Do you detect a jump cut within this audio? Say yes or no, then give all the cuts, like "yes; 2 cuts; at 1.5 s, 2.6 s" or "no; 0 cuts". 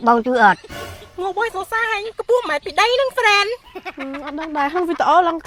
no; 0 cuts